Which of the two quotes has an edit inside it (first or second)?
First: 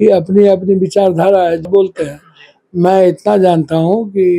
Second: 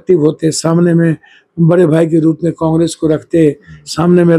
first